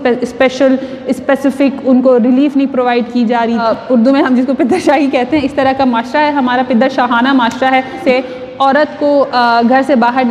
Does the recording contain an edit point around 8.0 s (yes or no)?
yes